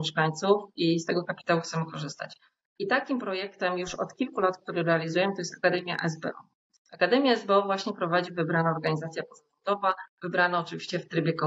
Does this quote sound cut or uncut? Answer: uncut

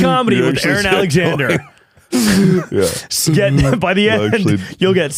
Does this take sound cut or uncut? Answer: uncut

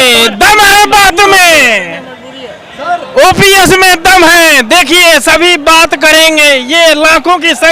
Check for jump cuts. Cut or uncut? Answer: uncut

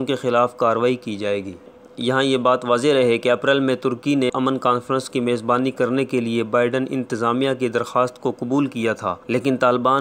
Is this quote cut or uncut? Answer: uncut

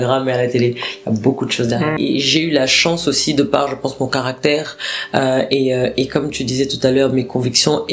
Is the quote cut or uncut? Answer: cut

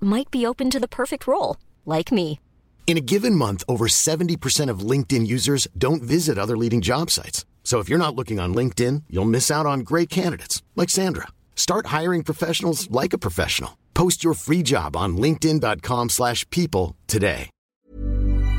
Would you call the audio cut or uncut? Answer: cut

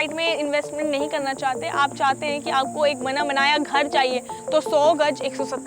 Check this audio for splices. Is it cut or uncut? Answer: cut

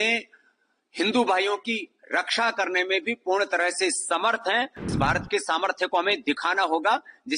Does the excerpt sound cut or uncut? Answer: cut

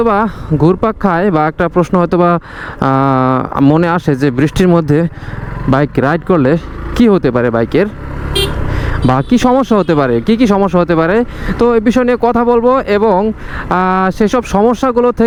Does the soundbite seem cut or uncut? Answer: uncut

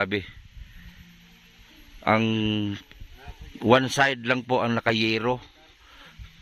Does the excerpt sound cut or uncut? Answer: uncut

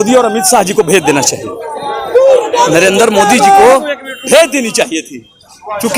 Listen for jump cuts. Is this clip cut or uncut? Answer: uncut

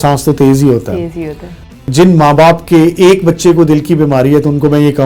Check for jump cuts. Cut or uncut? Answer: cut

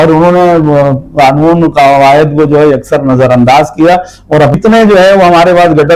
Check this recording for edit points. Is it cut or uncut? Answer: cut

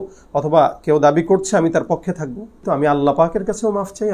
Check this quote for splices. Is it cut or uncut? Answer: cut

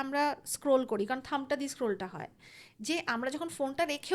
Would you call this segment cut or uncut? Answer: uncut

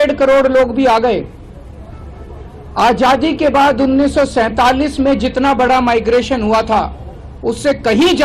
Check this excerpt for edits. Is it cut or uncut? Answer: uncut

